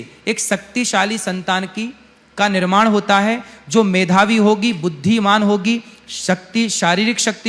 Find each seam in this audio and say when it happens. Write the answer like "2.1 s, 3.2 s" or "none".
none